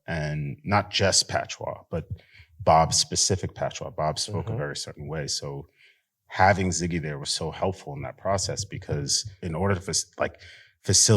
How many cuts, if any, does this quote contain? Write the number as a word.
one